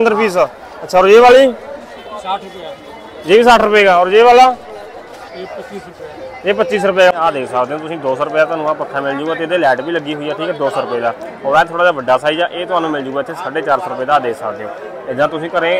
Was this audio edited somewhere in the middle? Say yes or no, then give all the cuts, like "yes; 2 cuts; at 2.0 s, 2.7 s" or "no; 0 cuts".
no; 0 cuts